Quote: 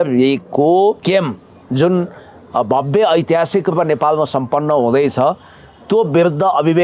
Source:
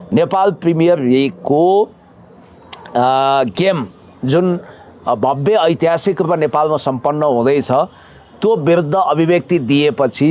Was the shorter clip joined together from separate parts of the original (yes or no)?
yes